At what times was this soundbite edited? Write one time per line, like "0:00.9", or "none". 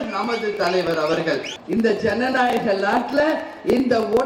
0:01.5